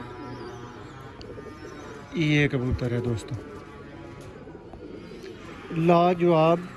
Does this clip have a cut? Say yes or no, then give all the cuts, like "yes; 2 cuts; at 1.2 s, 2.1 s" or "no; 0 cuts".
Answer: no; 0 cuts